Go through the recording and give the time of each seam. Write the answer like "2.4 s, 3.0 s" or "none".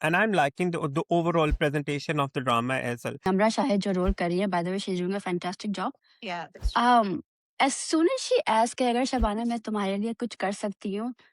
3.2 s